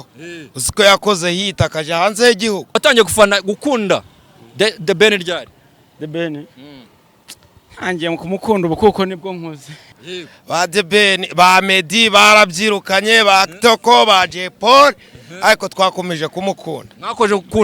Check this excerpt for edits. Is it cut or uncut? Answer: cut